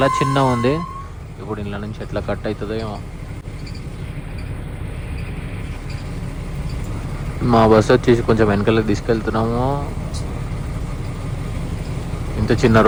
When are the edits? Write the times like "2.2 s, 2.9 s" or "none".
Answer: none